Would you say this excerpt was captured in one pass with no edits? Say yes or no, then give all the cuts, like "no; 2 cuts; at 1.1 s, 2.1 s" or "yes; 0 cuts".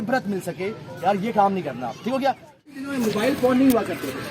no; 1 cut; at 2.7 s